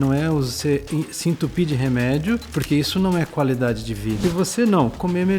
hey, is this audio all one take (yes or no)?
no